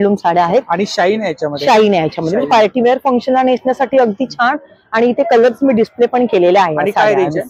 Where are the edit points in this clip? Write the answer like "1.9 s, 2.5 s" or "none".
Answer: none